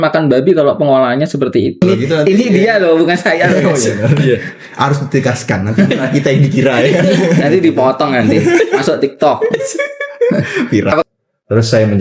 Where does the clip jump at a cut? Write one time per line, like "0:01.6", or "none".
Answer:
0:01.8
0:11.0